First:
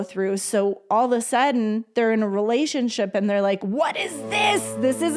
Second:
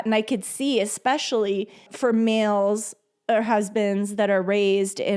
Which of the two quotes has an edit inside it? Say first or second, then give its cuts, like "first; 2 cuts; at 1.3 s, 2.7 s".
second; 1 cut; at 1.9 s